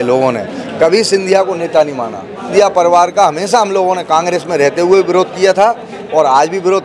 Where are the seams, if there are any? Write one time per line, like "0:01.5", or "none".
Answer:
0:02.5